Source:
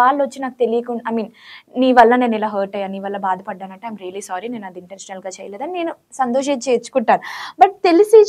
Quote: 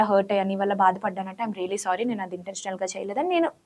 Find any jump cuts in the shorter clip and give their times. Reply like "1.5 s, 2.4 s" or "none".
none